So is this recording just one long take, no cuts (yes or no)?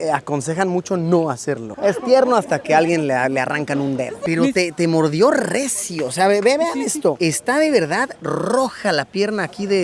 no